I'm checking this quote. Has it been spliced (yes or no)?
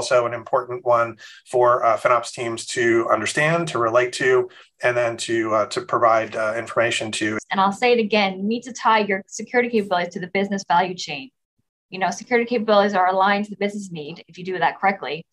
yes